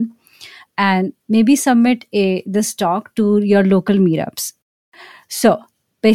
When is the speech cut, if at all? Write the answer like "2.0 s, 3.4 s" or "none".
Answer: 4.6 s